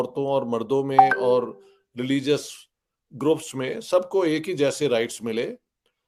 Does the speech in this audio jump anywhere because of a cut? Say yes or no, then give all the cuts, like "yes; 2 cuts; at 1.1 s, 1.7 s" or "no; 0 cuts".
no; 0 cuts